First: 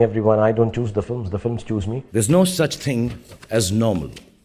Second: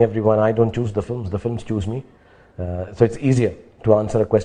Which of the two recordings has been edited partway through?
first; 1 cut; at 2.0 s

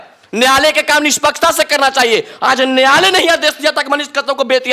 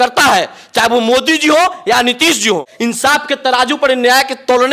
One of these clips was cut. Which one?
second; 1 cut; at 2.7 s

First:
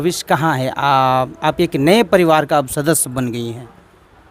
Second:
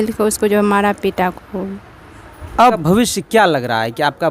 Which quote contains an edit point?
second; 1 cut; at 2.7 s

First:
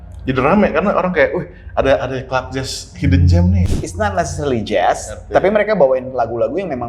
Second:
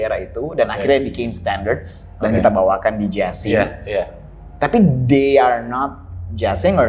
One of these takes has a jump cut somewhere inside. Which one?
first; 1 cut; at 3.7 s

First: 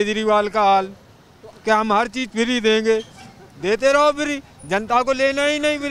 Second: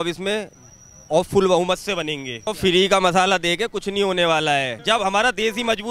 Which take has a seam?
second; 2 cuts; at 2.4 s, 4.8 s

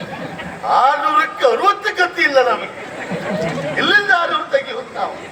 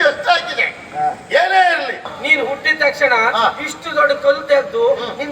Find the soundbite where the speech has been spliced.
second; 1 cut; at 2.2 s

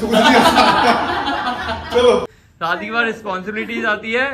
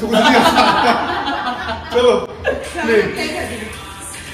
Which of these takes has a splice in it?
first; 1 cut; at 2.3 s

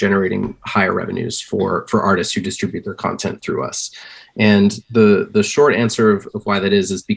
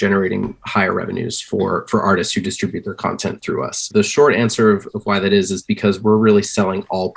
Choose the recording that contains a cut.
second; 1 cut; at 3.9 s

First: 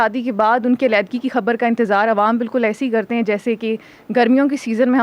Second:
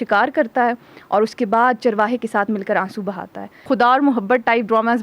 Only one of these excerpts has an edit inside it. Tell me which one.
second; 1 cut; at 3.6 s

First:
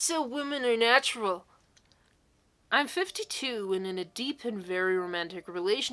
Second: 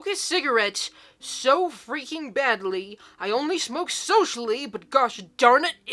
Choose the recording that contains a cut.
first; 1 cut; at 2.6 s

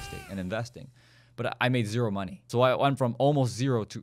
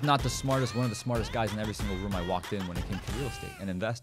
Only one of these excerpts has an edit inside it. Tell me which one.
first; 1 cut; at 2.4 s

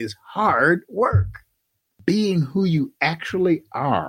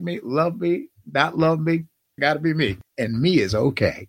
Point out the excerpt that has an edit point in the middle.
second; 2 cuts; at 2.2 s, 2.8 s

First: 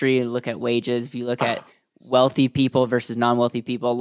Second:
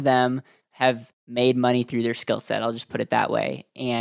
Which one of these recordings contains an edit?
second; 1 cut; at 1.2 s

